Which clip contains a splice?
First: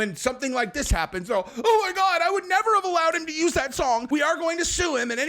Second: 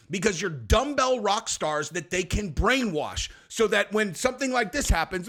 first; 1 cut; at 4.1 s

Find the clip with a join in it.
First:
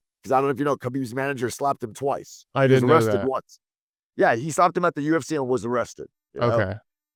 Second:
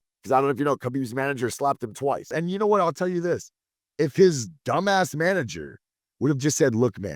second; 1 cut; at 2.4 s

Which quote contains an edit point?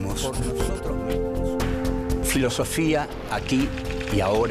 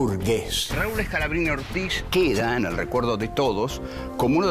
second; 1 cut; at 1.5 s

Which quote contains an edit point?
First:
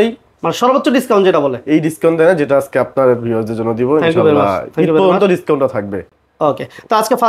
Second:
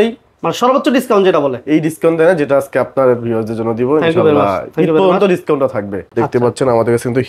second; 1 cut; at 6.1 s

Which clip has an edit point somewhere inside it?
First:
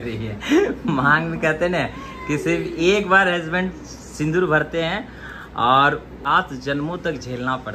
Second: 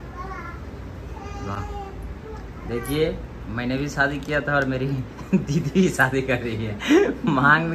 first; 1 cut; at 6.2 s

